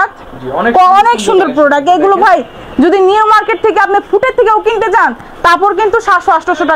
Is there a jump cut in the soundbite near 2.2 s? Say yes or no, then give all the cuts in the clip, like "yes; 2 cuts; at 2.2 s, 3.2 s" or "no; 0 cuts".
no; 0 cuts